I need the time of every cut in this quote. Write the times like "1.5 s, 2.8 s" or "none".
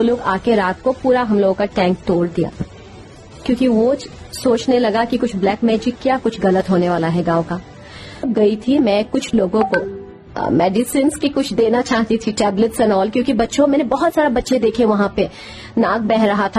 8.3 s